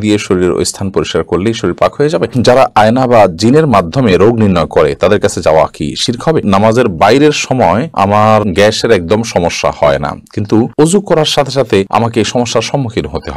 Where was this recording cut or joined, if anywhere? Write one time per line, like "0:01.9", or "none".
0:02.3
0:06.4
0:08.0
0:11.9